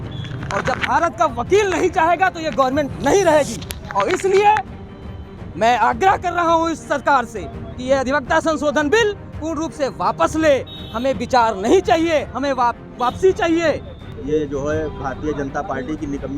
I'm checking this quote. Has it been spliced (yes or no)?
no